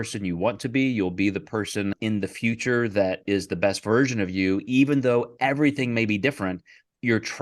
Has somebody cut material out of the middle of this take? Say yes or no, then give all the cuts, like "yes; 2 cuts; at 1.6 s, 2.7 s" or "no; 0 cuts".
yes; 1 cut; at 2.0 s